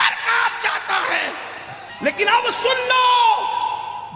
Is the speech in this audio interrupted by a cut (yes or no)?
yes